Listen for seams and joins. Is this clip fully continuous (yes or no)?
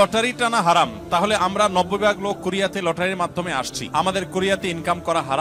yes